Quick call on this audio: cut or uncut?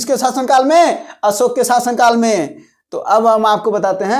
uncut